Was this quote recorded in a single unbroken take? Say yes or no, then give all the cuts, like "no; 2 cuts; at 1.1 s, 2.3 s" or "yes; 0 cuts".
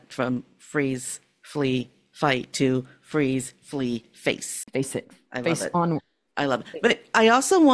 no; 1 cut; at 4.5 s